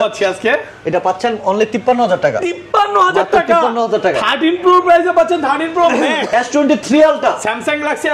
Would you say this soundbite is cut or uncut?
cut